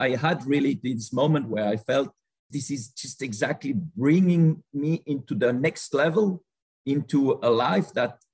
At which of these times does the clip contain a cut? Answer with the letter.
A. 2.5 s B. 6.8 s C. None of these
C